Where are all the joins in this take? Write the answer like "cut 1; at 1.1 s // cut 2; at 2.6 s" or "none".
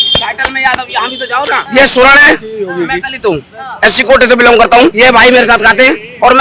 cut 1; at 1.6 s // cut 2; at 4.9 s